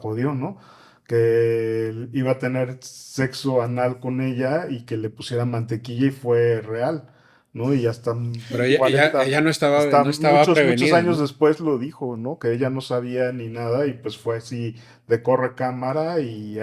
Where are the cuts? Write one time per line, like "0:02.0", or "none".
none

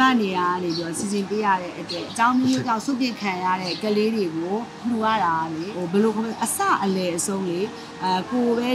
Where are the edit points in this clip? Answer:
0:02.0
0:03.7
0:04.8
0:05.7

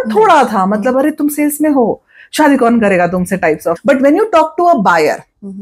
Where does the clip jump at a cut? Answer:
0:03.7

